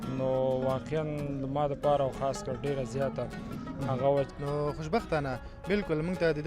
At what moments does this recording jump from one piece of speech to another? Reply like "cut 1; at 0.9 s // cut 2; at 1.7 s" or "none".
cut 1; at 4.3 s

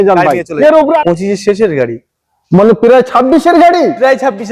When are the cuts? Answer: cut 1; at 1.0 s

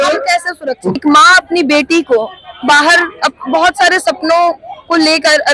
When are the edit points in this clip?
cut 1; at 1.0 s

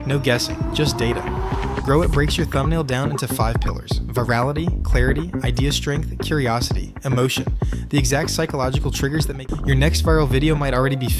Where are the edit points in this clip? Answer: cut 1; at 9.4 s

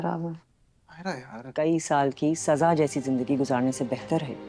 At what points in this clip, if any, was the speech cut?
cut 1; at 1.5 s

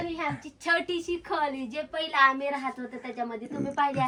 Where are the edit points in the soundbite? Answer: none

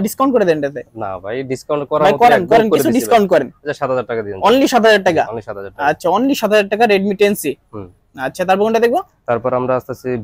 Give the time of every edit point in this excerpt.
none

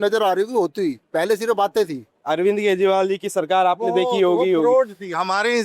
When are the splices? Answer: cut 1; at 1.0 s // cut 2; at 2.1 s

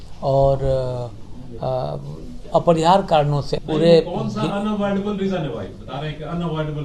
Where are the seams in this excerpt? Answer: cut 1; at 3.6 s

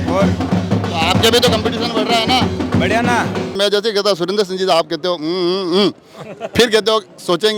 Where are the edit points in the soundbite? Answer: cut 1; at 3.5 s

